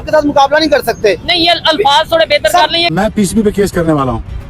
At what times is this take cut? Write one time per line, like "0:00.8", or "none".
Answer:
0:02.9